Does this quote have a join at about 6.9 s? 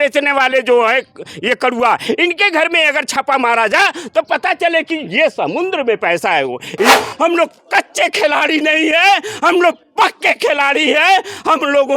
yes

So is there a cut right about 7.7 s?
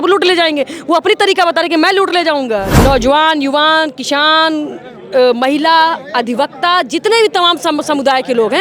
no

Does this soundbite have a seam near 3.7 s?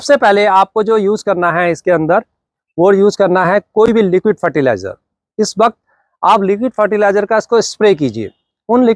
no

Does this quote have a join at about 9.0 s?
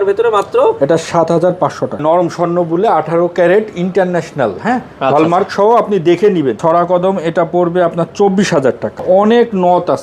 yes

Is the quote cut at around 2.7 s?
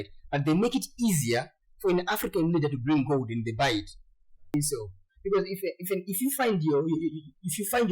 no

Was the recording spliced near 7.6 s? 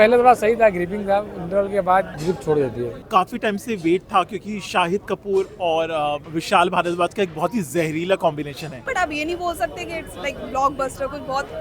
no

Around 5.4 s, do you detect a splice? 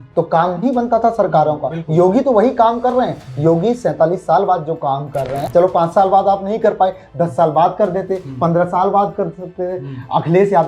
yes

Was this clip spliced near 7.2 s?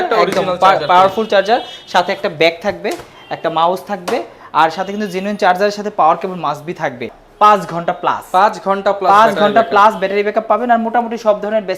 yes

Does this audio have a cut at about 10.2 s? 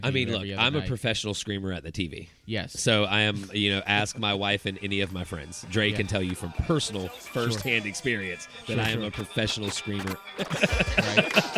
yes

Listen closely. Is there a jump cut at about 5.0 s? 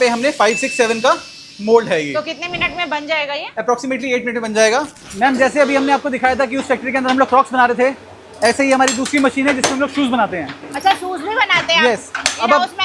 yes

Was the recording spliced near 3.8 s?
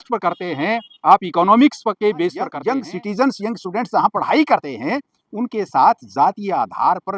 no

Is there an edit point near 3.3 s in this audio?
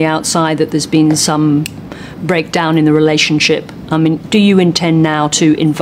no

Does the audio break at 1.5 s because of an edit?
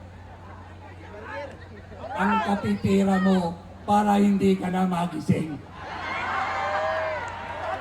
no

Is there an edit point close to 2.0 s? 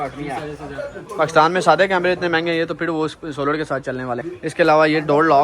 no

